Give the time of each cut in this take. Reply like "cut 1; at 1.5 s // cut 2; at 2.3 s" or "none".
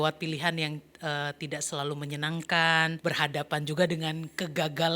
cut 1; at 3.0 s